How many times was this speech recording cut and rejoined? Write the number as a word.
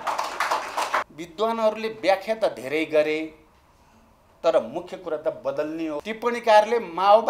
two